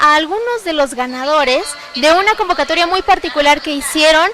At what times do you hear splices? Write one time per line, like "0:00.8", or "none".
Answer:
none